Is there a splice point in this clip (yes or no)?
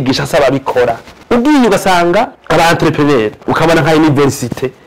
no